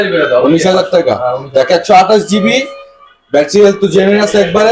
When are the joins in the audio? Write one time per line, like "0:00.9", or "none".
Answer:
none